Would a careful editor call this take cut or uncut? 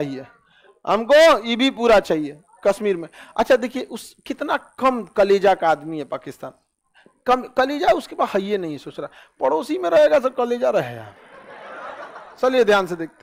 uncut